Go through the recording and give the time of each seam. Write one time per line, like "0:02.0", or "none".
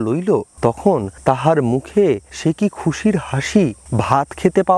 0:01.0
0:02.3
0:03.8